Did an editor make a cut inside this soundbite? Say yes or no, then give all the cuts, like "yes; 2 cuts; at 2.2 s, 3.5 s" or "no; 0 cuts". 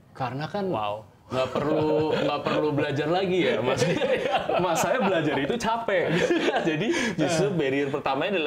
no; 0 cuts